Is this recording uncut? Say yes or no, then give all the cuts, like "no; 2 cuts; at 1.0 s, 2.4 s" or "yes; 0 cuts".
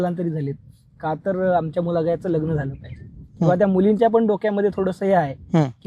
yes; 0 cuts